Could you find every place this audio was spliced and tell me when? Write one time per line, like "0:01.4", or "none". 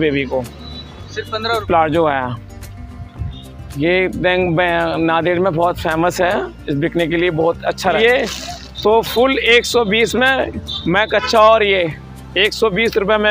0:01.6
0:08.0

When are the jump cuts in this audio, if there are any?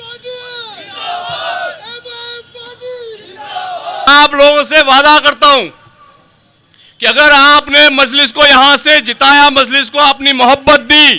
0:04.1

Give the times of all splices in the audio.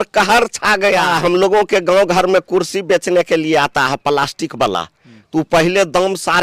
0:01.1

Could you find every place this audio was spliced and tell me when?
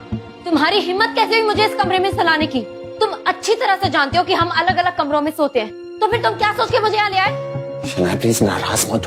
none

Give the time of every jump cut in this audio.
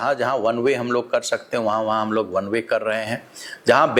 none

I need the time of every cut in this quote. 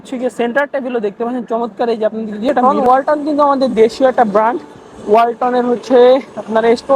0:02.6

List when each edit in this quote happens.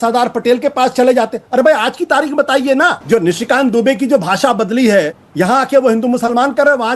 0:03.0
0:05.2

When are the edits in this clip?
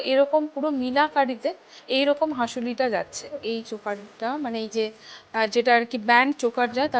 0:03.4

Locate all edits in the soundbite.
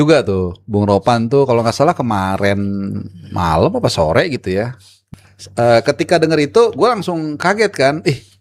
none

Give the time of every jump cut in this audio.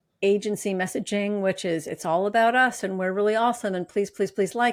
none

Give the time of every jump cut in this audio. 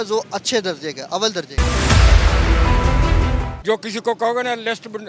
0:01.5
0:03.5

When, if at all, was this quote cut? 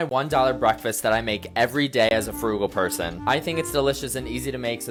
none

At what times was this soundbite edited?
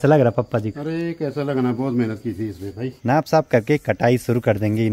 0:02.9

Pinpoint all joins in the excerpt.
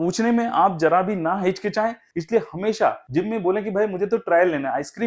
0:02.0

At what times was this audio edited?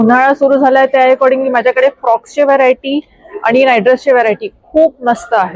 none

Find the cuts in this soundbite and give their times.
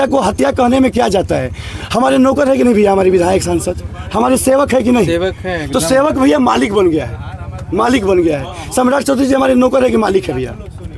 none

